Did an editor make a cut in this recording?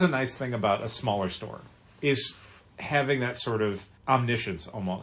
yes; 1 cut; at 3.9 s

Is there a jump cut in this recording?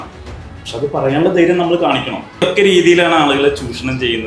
yes; 1 cut; at 2.4 s

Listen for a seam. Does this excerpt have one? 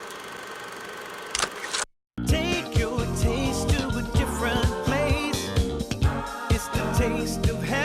yes; 1 cut; at 2.0 s

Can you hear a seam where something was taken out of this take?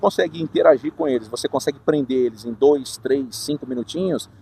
no; 0 cuts

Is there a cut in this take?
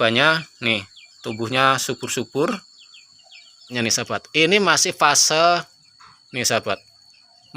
yes; 1 cut; at 3.8 s

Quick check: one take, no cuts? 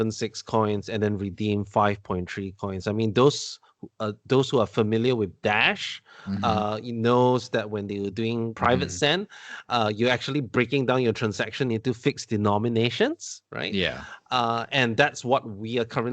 no; 1 cut; at 8.6 s

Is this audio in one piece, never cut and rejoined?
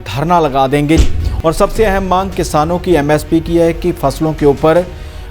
no; 1 cut; at 1.1 s

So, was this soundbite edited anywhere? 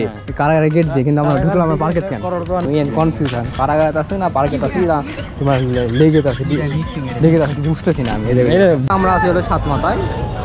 yes; 2 cuts; at 2.6 s, 8.9 s

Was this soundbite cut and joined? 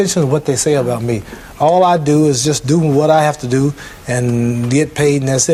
no; 0 cuts

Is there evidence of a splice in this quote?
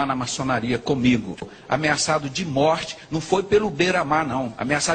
yes; 1 cut; at 1.5 s

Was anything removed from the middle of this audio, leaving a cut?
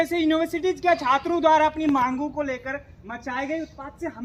no; 0 cuts

